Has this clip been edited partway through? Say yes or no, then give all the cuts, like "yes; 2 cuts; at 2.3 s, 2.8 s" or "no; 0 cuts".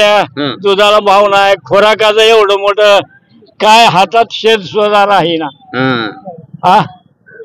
no; 0 cuts